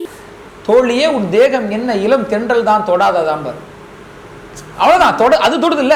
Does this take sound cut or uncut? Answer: uncut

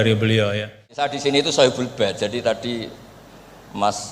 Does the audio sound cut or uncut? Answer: cut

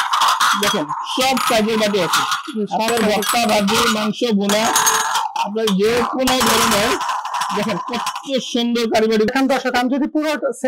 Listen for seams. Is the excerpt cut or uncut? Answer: cut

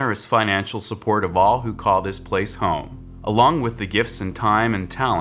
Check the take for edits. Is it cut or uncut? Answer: uncut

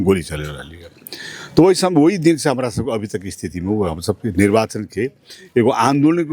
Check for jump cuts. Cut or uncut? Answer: uncut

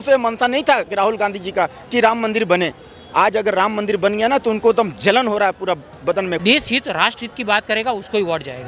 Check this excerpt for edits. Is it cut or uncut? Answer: cut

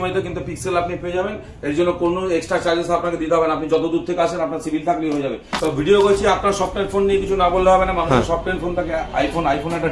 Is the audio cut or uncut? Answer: uncut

